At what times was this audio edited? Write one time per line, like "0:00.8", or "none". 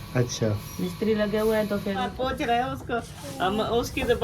0:02.1